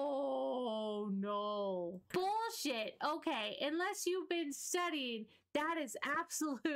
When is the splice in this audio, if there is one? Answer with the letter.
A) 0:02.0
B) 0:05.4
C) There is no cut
A